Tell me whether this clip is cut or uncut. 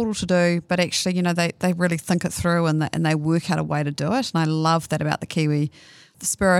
uncut